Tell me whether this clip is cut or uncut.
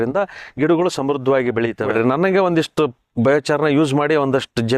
cut